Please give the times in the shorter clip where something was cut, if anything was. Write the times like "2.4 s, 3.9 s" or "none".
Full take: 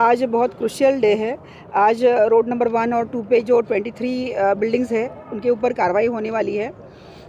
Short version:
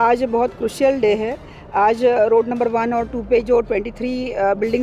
none